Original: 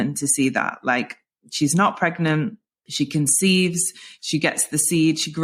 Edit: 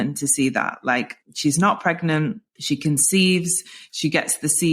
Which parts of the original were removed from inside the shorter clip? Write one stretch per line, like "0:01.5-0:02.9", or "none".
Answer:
0:01.2-0:01.4
0:02.6-0:02.8